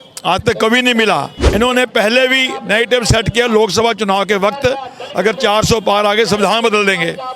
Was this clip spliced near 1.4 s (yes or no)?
yes